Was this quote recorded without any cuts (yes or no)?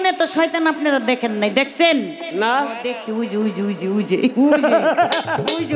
no